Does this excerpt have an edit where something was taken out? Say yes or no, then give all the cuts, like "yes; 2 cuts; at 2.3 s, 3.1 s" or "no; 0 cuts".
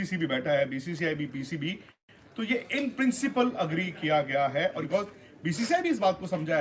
yes; 1 cut; at 4.8 s